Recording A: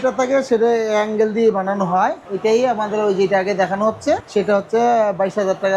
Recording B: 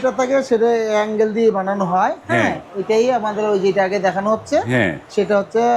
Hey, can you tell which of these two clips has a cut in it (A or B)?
A